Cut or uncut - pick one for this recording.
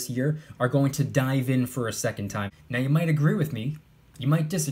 cut